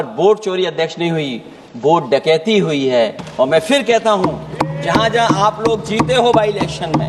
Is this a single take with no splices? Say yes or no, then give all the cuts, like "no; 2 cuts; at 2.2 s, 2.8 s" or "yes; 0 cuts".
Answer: yes; 0 cuts